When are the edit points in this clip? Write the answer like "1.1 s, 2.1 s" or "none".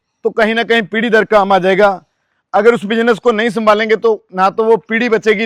none